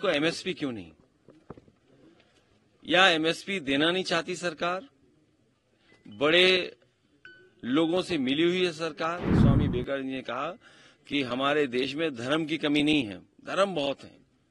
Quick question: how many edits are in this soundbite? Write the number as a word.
one